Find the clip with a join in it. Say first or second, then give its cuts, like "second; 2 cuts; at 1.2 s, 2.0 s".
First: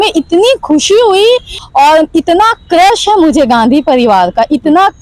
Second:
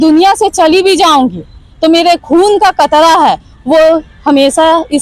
first; 1 cut; at 1.6 s